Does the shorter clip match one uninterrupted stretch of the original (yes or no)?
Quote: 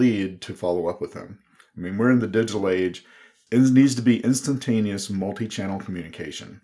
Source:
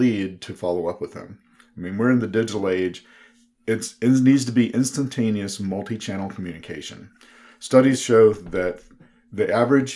no